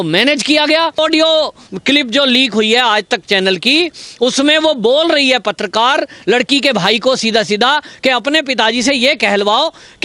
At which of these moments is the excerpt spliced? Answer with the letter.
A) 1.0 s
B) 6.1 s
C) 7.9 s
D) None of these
A